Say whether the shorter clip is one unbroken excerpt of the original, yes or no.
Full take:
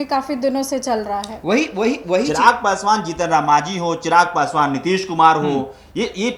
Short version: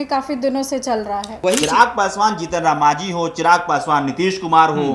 no